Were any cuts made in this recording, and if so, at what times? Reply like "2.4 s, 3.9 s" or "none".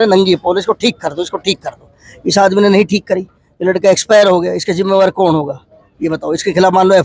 none